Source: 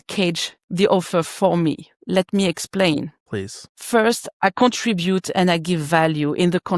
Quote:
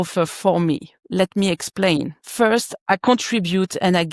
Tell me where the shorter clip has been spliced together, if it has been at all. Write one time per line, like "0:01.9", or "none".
0:02.2